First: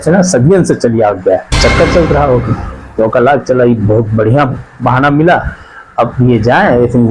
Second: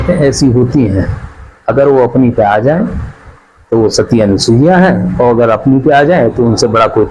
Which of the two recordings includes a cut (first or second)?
first